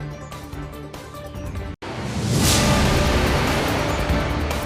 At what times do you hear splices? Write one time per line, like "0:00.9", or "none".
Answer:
0:01.7